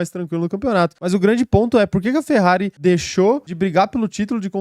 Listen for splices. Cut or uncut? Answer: cut